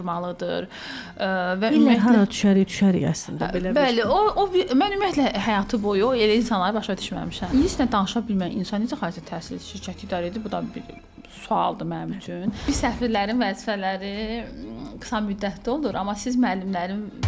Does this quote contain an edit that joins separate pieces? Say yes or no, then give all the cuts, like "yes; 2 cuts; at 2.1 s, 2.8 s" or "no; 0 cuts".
yes; 2 cuts; at 7.4 s, 12.6 s